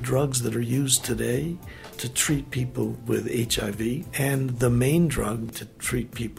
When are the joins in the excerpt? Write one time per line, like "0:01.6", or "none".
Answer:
0:04.1
0:05.5